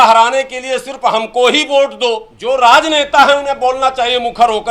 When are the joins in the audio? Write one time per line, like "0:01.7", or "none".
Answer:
0:02.3